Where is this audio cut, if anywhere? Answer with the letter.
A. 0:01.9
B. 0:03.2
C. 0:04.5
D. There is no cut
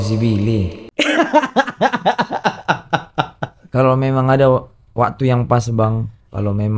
D